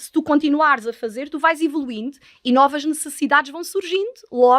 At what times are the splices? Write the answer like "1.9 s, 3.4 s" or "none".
none